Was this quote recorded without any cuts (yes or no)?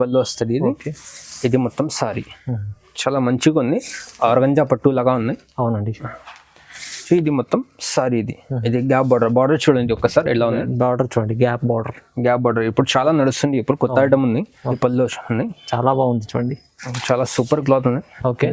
no